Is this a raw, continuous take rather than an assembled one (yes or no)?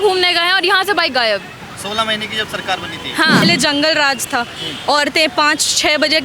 no